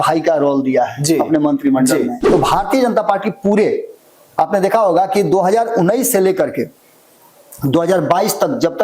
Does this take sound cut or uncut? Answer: cut